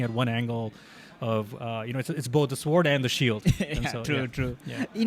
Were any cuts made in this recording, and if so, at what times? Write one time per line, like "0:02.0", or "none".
none